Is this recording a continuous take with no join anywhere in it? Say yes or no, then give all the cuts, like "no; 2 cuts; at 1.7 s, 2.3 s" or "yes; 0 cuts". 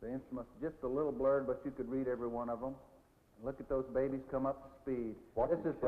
no; 1 cut; at 4.7 s